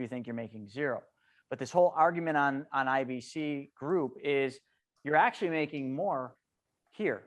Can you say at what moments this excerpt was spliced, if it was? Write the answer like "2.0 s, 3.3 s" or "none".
none